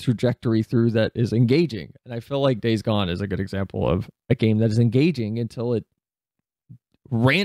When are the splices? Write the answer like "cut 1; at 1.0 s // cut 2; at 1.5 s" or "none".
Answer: none